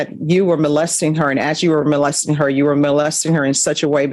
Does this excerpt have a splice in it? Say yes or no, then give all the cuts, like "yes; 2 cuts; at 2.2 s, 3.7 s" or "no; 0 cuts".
no; 0 cuts